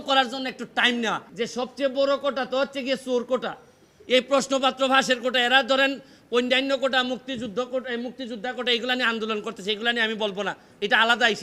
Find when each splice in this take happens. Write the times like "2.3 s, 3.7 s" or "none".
1.2 s